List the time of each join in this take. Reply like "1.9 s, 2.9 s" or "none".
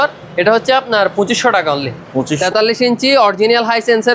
2.4 s